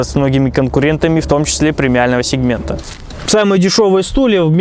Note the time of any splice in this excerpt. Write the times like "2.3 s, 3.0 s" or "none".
2.8 s